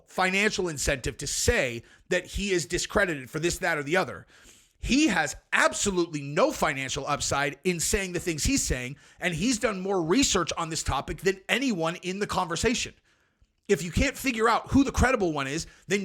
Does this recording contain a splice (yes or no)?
no